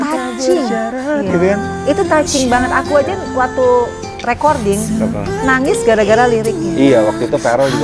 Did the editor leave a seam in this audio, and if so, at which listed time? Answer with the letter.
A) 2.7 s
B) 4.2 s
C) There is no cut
C